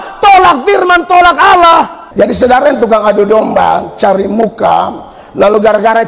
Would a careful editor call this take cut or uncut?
cut